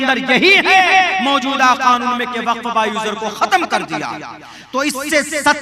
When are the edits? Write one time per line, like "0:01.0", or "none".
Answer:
none